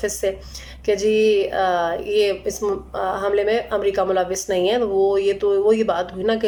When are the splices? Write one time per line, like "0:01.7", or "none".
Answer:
none